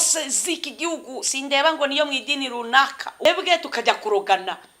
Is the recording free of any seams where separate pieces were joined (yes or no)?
no